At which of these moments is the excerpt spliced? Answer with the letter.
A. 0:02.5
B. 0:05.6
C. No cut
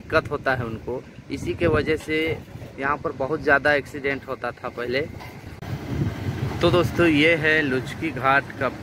B